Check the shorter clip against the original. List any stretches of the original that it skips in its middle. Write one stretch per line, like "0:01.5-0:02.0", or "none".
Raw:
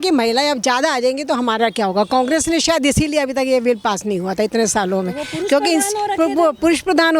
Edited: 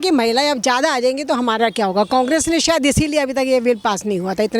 none